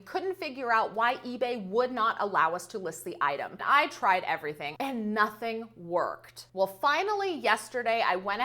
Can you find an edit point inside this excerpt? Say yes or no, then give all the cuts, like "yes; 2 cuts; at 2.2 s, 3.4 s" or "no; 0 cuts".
yes; 2 cuts; at 3.6 s, 4.7 s